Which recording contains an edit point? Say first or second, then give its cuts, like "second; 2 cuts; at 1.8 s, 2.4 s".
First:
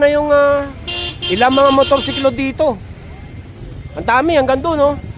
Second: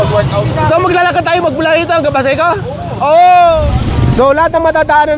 second; 1 cut; at 3.6 s